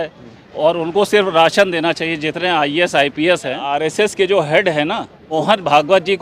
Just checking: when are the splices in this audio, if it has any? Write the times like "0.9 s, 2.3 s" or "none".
3.7 s, 5.2 s